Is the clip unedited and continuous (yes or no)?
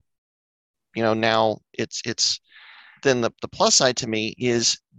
no